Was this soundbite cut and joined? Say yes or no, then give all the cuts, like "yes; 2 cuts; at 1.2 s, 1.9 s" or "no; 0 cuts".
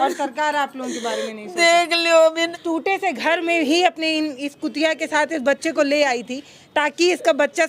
yes; 1 cut; at 2.5 s